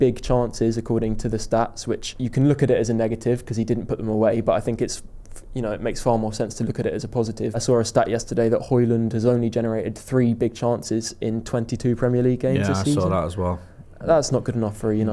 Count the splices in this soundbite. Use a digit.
2